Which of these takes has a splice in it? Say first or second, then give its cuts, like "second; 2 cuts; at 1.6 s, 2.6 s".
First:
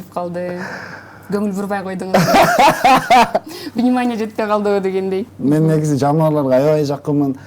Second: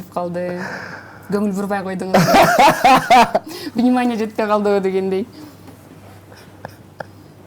first; 1 cut; at 5.3 s